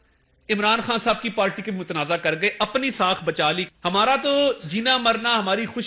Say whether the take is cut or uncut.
cut